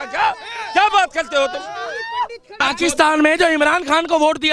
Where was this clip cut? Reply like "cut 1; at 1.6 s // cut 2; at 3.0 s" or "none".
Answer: cut 1; at 2.6 s

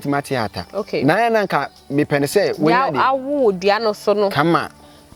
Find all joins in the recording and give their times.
none

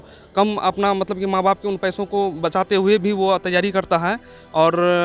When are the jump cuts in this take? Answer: none

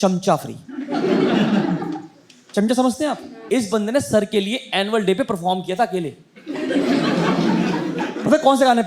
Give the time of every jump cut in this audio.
cut 1; at 3.3 s

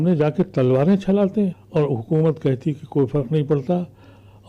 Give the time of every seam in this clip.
cut 1; at 1.6 s

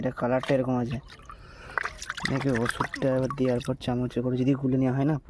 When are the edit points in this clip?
none

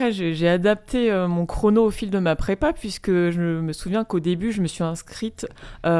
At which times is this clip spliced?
none

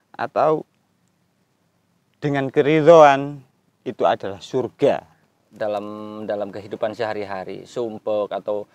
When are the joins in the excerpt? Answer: cut 1; at 5.4 s

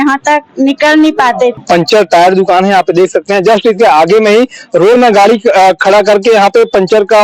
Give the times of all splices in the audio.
cut 1; at 1.6 s

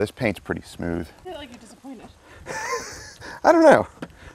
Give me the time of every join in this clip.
cut 1; at 1.2 s

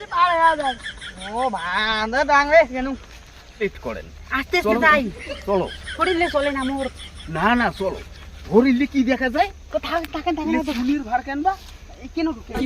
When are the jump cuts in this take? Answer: cut 1; at 3.6 s

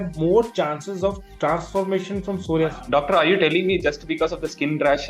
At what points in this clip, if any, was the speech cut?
cut 1; at 2.8 s

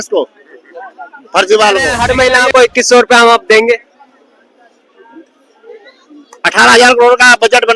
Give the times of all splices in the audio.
cut 1; at 2.0 s

